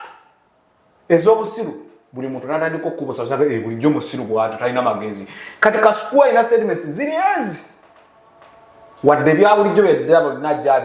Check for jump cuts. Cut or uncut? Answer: uncut